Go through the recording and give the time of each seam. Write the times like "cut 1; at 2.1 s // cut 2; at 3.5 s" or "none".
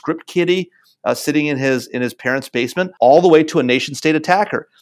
cut 1; at 2.9 s